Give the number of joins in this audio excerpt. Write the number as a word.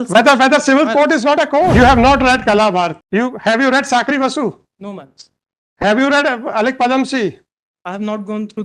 two